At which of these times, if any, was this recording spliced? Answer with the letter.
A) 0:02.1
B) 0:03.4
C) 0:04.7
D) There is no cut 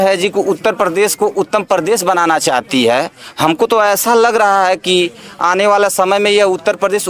D